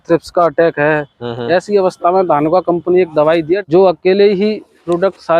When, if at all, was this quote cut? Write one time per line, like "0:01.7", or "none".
0:03.6